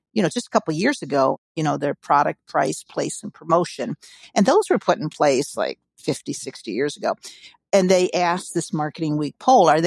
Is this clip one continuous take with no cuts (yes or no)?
no